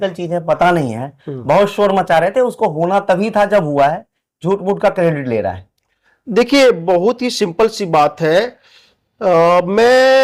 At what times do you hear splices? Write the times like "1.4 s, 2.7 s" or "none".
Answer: none